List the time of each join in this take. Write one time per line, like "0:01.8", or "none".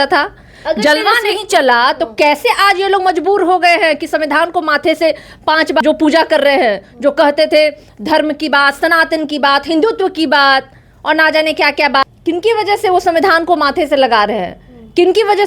0:05.8
0:12.0